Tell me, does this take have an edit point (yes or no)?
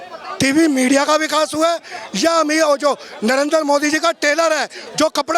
no